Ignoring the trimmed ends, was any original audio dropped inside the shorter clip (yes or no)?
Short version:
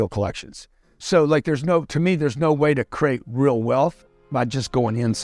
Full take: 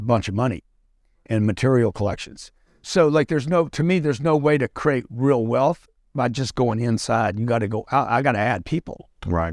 no